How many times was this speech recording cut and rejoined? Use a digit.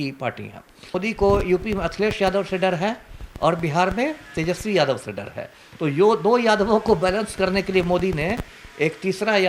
1